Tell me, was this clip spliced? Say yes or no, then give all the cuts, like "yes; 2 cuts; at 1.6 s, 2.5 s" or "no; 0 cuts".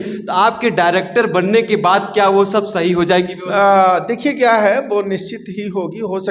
no; 0 cuts